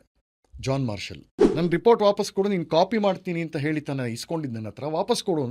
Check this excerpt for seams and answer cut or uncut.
cut